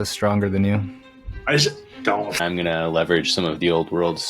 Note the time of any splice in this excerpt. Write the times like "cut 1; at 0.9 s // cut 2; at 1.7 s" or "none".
cut 1; at 2.4 s